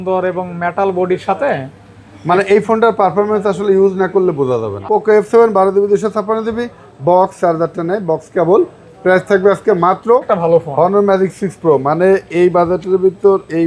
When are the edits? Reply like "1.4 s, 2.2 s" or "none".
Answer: 4.7 s, 10.3 s